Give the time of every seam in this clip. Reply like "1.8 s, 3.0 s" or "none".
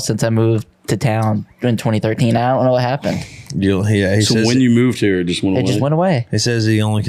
none